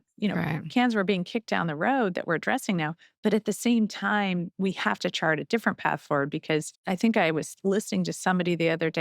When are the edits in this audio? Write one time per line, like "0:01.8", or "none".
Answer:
0:06.7